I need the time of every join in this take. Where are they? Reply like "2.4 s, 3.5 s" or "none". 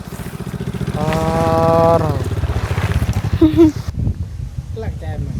3.9 s